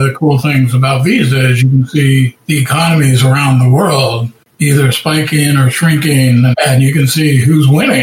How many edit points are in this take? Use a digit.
1